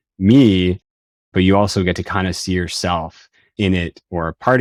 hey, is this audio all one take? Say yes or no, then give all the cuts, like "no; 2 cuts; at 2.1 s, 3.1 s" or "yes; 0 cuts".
yes; 0 cuts